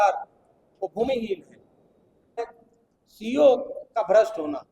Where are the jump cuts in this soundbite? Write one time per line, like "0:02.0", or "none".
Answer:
0:02.4